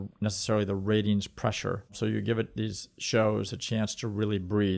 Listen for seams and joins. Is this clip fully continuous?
no; 1 cut; at 2.0 s

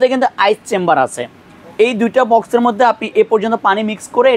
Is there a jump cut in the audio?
no; 0 cuts

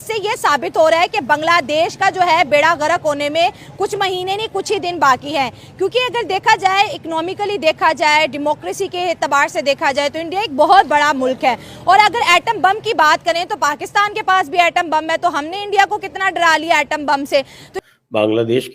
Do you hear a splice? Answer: yes; 1 cut; at 17.7 s

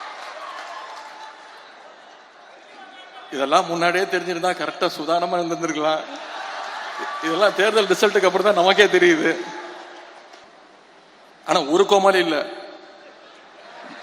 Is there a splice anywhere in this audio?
yes; 1 cut; at 10.4 s

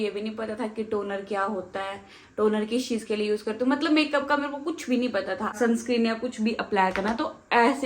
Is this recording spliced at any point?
yes; 1 cut; at 5.6 s

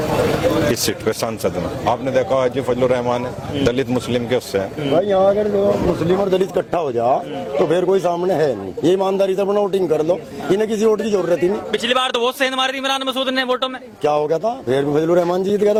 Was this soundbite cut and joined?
no; 0 cuts

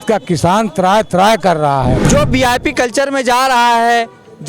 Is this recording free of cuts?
no; 1 cut; at 2.0 s

